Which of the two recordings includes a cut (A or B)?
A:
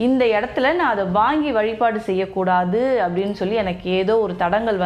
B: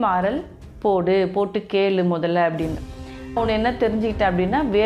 B